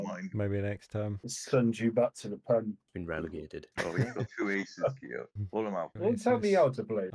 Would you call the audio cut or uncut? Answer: uncut